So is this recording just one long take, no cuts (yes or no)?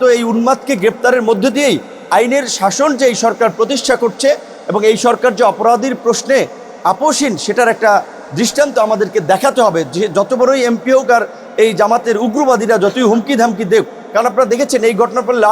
yes